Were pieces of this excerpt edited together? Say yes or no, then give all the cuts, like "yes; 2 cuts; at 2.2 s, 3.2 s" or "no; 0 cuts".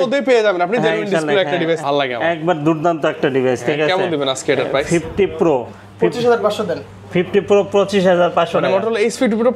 yes; 1 cut; at 1.8 s